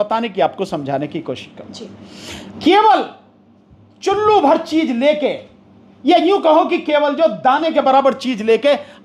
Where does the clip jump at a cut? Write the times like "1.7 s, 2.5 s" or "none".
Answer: 2.5 s